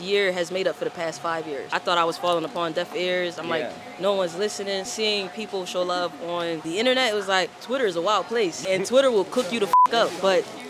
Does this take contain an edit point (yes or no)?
yes